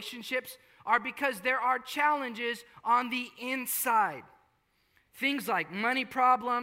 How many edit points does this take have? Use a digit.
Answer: 0